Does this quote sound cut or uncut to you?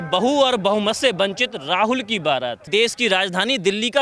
cut